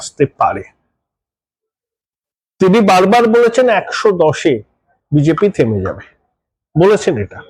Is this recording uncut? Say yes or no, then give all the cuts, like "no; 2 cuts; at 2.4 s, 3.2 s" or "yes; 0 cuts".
yes; 0 cuts